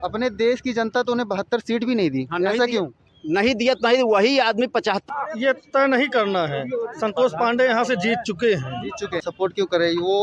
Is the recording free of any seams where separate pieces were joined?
no; 2 cuts; at 5.0 s, 9.2 s

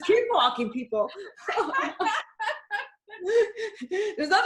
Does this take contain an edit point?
no; 0 cuts

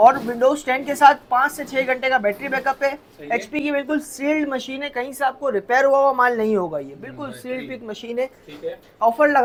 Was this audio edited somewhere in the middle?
no; 0 cuts

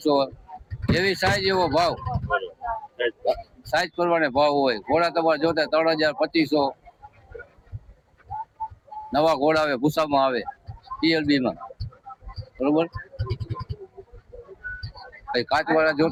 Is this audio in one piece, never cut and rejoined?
yes; 0 cuts

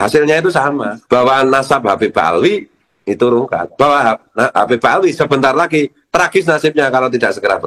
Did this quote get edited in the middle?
yes; 1 cut; at 0.9 s

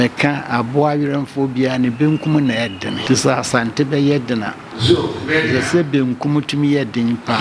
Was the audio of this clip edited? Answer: yes; 1 cut; at 3.0 s

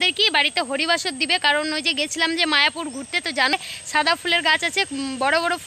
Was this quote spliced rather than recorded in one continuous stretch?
yes; 1 cut; at 3.5 s

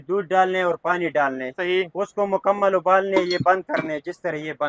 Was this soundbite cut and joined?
no; 0 cuts

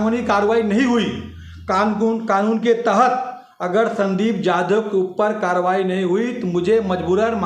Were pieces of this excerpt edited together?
no; 0 cuts

